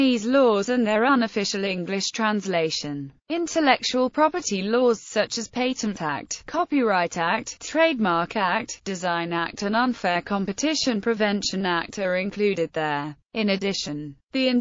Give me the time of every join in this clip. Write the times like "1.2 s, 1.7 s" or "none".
9.9 s